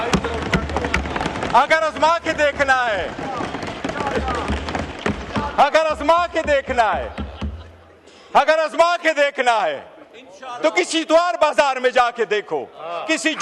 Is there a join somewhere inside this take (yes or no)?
no